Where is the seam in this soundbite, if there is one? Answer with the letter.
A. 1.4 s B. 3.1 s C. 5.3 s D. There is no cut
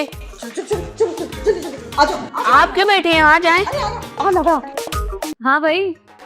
C